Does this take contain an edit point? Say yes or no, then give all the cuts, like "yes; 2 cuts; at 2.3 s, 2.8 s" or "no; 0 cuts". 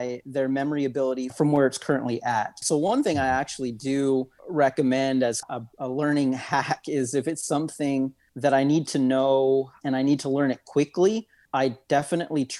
yes; 7 cuts; at 1.3 s, 2.6 s, 4.4 s, 5.4 s, 8.2 s, 9.8 s, 11.4 s